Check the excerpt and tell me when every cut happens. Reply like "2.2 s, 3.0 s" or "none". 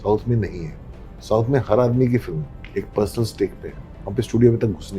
1.0 s, 4.0 s